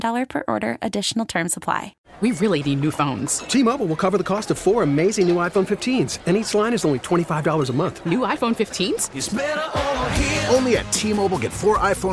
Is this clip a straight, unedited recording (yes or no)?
no